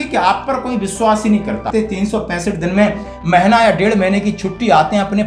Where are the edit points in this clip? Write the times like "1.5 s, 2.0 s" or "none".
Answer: 1.7 s